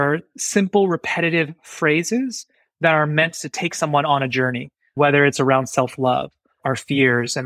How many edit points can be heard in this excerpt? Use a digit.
2